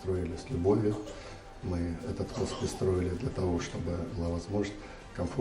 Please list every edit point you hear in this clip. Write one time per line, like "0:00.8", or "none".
0:04.1